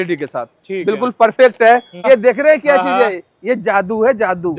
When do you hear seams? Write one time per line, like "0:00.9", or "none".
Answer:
0:02.1